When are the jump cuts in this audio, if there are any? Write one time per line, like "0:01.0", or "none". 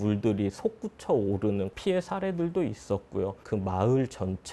0:03.4